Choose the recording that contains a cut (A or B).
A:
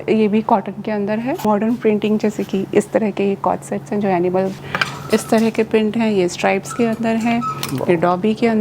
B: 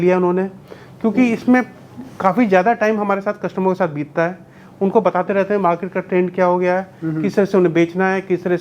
A